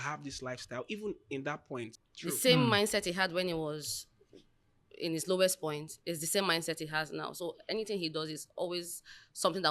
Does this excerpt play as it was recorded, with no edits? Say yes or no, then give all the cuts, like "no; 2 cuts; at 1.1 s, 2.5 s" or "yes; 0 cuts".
no; 1 cut; at 2.0 s